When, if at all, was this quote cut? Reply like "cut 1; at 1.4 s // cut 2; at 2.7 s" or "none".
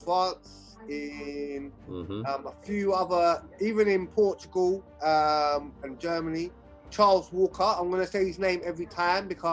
cut 1; at 6.9 s